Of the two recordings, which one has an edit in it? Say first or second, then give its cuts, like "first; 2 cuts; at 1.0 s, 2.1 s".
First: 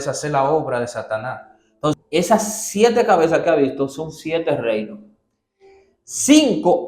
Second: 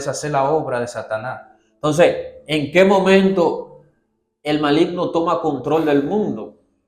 first; 1 cut; at 1.9 s